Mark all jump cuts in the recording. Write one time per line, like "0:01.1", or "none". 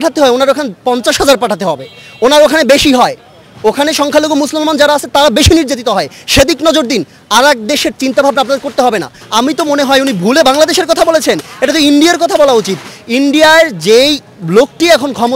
0:09.2